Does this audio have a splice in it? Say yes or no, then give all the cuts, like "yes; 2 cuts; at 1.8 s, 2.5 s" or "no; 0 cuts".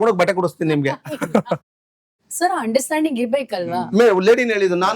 yes; 2 cuts; at 1.7 s, 3.9 s